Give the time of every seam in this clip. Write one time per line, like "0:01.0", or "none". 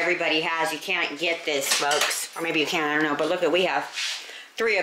0:02.2